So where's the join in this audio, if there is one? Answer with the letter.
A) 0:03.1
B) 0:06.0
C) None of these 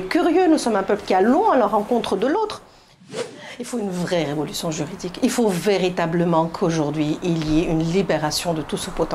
A